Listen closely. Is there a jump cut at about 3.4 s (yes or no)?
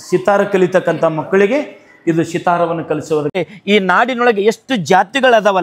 yes